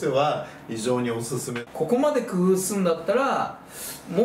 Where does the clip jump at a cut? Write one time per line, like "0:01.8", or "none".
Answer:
0:01.5